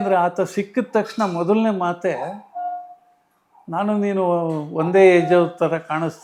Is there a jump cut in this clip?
no; 0 cuts

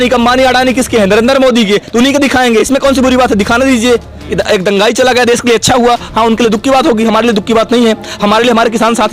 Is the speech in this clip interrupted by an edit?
yes; 1 cut; at 4.2 s

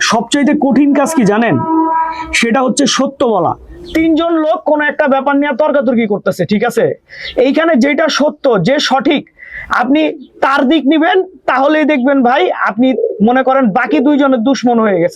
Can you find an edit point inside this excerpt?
yes; 1 cut; at 3.7 s

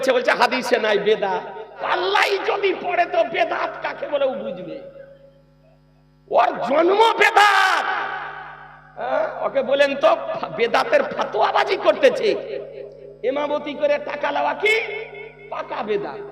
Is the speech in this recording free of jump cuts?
no; 1 cut; at 1.8 s

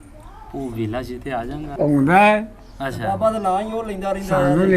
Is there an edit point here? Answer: yes; 1 cut; at 1.7 s

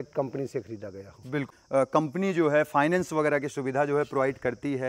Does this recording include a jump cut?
yes; 1 cut; at 1.5 s

